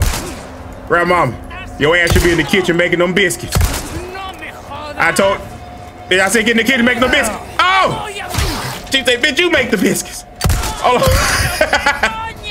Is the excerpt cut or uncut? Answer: uncut